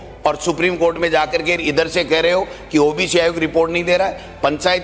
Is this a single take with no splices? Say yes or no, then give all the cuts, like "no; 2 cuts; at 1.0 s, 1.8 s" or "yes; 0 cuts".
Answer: yes; 0 cuts